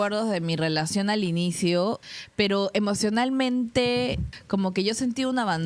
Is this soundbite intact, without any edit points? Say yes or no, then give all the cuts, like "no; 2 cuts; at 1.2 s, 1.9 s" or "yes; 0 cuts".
no; 2 cuts; at 2.1 s, 4.3 s